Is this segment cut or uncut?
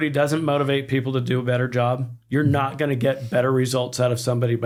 uncut